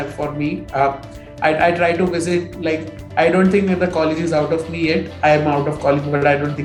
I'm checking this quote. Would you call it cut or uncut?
uncut